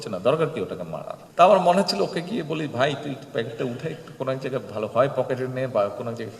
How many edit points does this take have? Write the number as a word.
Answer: one